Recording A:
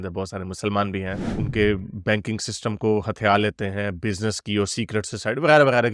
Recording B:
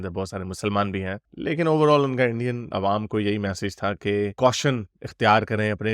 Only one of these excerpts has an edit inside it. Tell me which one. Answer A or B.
A